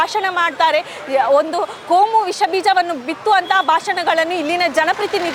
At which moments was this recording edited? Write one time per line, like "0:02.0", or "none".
none